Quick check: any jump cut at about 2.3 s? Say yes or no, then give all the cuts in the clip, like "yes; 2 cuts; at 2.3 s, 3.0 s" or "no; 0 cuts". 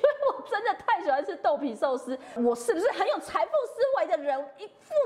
yes; 1 cut; at 2.3 s